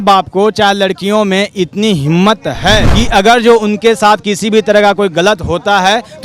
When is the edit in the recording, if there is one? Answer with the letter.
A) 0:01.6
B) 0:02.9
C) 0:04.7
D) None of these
B